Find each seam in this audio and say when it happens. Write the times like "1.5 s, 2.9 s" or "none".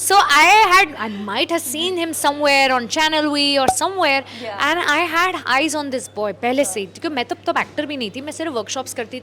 none